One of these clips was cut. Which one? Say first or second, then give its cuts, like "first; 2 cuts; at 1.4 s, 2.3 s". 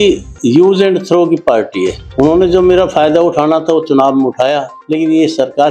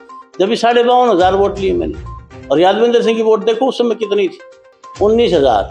first; 2 cuts; at 2.0 s, 4.7 s